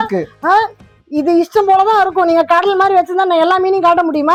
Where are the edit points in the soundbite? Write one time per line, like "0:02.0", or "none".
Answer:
none